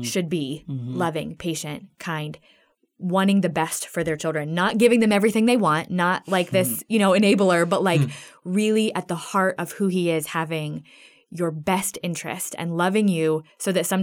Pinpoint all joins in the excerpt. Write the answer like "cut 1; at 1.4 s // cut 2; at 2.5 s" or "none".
none